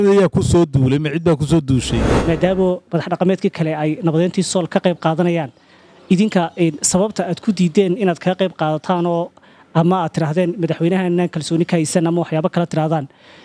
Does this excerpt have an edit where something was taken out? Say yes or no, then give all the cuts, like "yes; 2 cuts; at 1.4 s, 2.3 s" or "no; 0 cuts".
yes; 1 cut; at 2.2 s